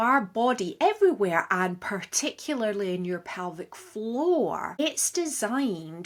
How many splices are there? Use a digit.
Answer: 0